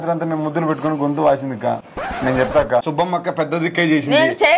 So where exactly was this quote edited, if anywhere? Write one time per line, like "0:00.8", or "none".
0:01.8
0:02.9